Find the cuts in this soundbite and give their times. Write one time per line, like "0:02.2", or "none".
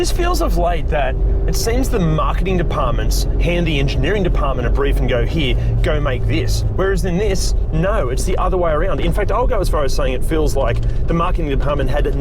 none

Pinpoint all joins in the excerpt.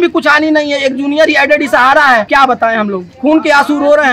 0:02.3

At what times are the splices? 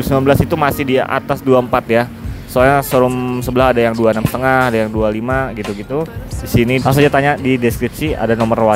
0:06.8

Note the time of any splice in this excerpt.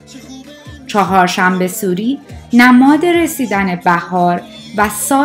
0:00.9

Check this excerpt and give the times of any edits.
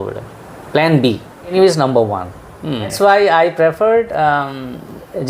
0:01.5
0:02.9

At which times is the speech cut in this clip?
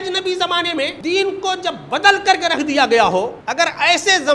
0:01.0
0:03.4

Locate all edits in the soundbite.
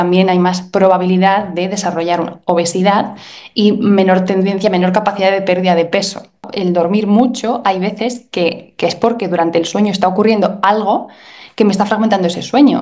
0:06.5

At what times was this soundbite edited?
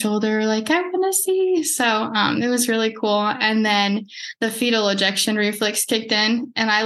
none

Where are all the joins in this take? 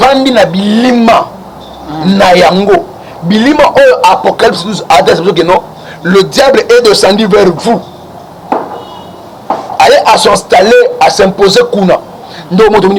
none

